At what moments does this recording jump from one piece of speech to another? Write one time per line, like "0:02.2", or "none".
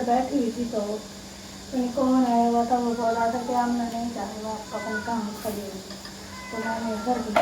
none